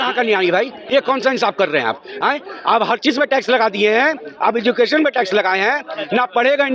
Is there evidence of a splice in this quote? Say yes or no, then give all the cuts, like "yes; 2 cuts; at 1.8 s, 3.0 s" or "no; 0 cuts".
no; 0 cuts